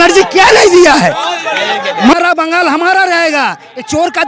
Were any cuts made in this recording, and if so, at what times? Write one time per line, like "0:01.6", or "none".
0:02.1